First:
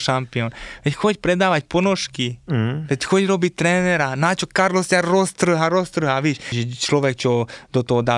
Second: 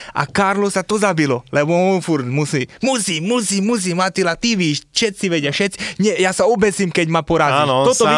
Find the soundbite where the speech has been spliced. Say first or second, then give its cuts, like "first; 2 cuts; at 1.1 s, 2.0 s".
first; 1 cut; at 6.6 s